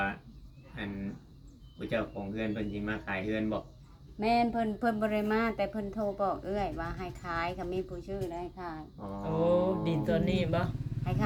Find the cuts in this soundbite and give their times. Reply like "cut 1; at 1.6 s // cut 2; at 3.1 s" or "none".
none